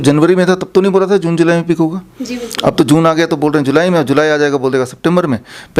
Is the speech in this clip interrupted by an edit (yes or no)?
no